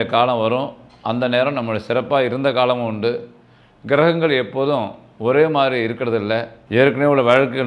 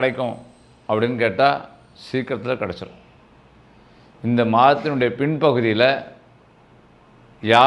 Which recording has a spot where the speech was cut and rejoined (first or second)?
first